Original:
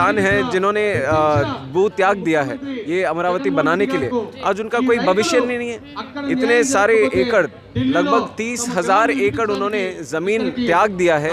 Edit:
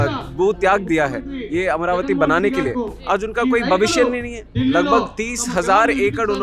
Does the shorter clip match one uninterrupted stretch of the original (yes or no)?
no